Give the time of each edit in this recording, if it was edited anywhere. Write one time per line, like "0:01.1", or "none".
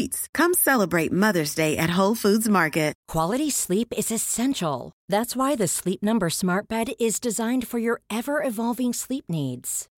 0:03.0